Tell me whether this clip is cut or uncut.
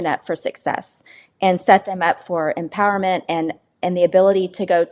uncut